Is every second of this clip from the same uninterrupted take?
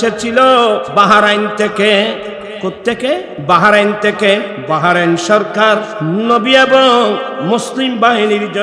no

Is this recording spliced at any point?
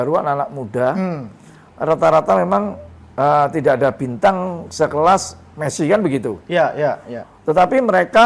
no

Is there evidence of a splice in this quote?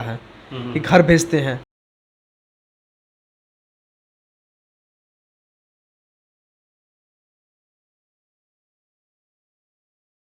no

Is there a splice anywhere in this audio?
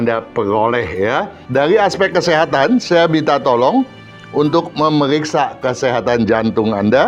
yes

